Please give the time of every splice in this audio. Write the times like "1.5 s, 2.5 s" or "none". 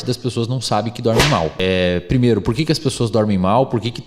1.5 s